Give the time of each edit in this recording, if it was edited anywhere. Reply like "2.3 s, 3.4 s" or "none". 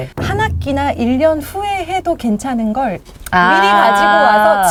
none